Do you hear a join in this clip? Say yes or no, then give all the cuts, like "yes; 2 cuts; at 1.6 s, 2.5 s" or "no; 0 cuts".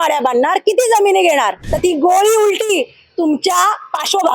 yes; 1 cut; at 1.6 s